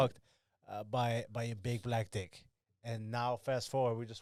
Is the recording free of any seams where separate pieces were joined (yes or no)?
yes